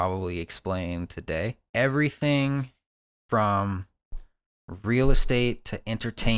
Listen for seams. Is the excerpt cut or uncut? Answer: cut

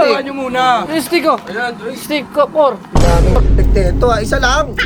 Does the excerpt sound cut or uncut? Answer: uncut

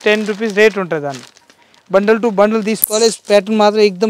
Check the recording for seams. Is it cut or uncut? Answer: uncut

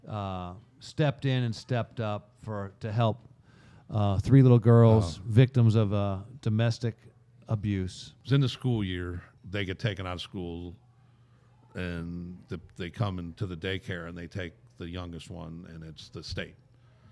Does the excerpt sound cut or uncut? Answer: cut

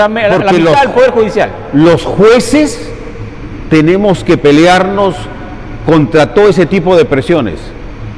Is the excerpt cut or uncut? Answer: uncut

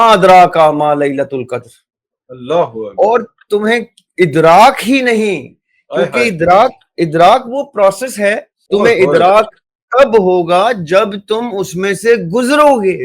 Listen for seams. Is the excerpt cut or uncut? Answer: cut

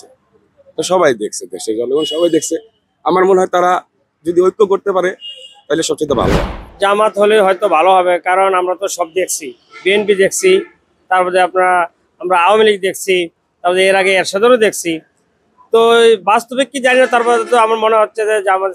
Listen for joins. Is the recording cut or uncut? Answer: cut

